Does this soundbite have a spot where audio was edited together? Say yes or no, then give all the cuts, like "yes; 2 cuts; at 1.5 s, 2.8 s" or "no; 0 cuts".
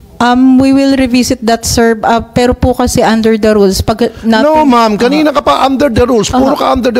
no; 0 cuts